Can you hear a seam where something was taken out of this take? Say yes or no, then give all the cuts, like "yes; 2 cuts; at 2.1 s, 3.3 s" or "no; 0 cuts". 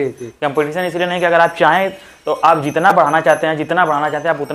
no; 0 cuts